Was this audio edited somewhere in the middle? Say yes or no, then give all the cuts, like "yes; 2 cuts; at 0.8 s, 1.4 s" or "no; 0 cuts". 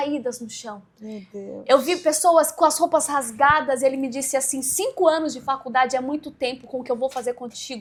no; 0 cuts